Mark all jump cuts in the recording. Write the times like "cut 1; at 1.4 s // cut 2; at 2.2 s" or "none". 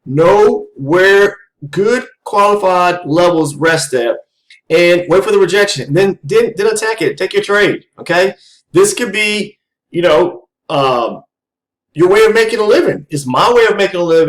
none